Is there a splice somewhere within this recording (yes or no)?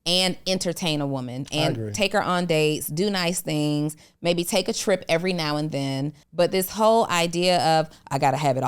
yes